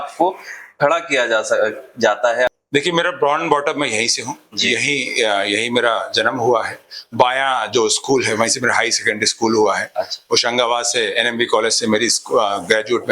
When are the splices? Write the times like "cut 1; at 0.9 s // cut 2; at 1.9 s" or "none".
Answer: cut 1; at 2.5 s